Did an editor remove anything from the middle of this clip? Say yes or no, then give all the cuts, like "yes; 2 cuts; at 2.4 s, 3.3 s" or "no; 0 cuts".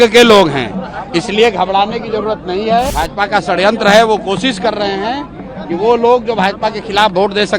yes; 1 cut; at 2.9 s